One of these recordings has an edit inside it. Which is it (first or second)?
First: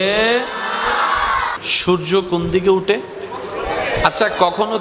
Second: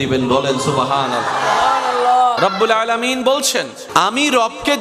second